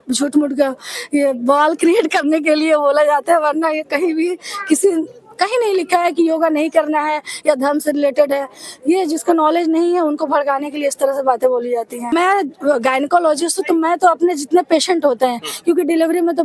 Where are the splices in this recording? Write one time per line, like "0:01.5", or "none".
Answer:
0:12.1